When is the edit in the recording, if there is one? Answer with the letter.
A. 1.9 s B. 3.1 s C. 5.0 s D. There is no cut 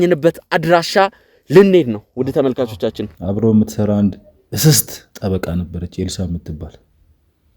B